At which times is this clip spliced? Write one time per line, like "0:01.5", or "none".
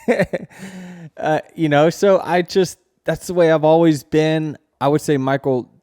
0:04.7